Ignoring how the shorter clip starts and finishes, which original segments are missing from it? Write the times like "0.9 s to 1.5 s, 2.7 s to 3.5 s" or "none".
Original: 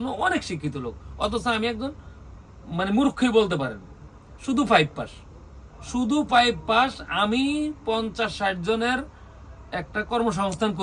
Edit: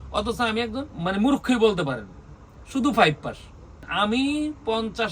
2.0 s to 2.6 s, 5.6 s to 7.0 s